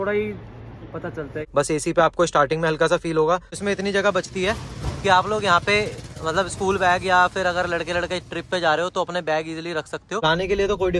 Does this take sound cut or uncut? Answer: cut